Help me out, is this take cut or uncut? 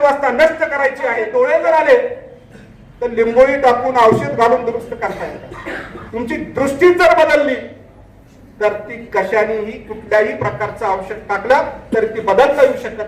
cut